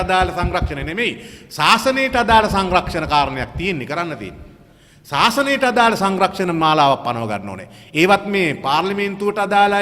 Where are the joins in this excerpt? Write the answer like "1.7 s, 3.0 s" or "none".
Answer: none

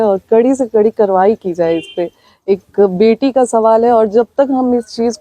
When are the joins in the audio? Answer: none

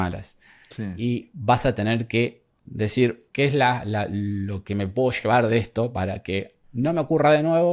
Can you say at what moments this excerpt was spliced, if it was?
2.9 s, 6.6 s

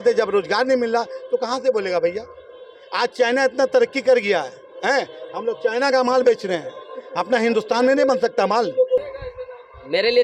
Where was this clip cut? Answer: 9.1 s

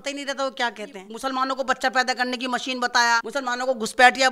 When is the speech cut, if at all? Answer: 1.0 s, 3.3 s

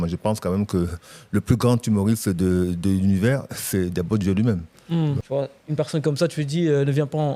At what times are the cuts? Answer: 5.2 s

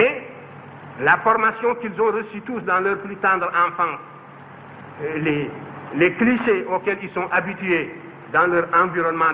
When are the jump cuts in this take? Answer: none

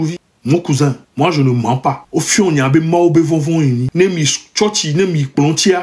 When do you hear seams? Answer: 1.0 s, 2.0 s, 3.9 s

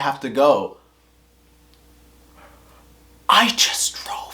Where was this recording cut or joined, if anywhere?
3.2 s

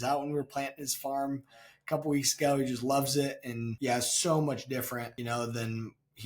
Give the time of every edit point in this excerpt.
3.6 s, 5.1 s

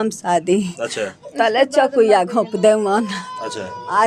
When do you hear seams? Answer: none

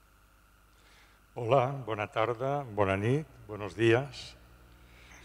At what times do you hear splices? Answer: 1.8 s

